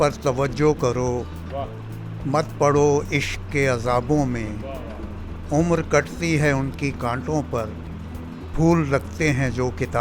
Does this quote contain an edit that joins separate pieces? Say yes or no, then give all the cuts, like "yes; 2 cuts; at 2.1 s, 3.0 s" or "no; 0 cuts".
no; 0 cuts